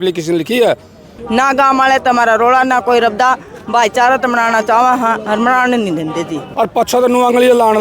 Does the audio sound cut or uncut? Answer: cut